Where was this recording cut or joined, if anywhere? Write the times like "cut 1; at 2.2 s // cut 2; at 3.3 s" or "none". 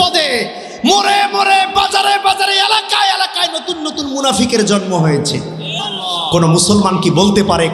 cut 1; at 5.7 s